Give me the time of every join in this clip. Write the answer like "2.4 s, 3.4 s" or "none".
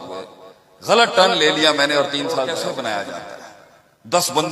2.5 s